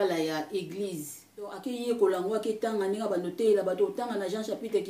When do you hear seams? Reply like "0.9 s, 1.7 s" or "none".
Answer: 1.6 s